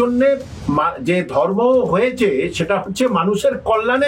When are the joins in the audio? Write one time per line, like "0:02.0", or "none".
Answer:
none